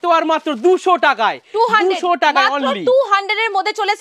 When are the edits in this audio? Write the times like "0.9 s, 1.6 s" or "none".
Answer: none